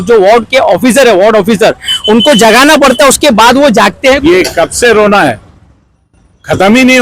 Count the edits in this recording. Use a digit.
1